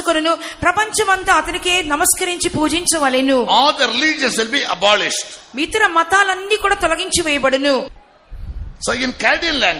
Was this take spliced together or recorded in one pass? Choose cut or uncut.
cut